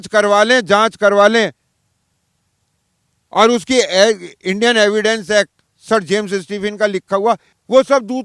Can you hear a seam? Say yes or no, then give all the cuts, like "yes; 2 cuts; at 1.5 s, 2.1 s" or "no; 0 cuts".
no; 0 cuts